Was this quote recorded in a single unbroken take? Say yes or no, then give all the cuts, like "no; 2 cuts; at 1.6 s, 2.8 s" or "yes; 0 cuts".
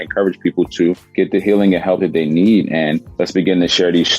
no; 2 cuts; at 1.0 s, 3.1 s